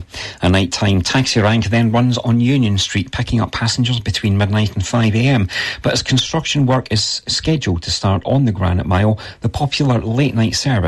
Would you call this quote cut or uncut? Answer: uncut